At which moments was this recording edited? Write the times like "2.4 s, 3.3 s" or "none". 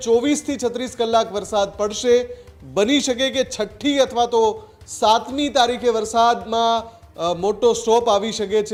none